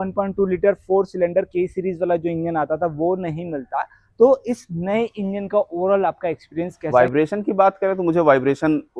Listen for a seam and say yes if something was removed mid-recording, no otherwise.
yes